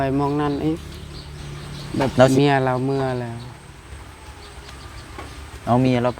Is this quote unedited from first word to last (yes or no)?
no